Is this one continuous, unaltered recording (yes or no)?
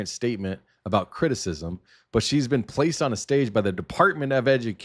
yes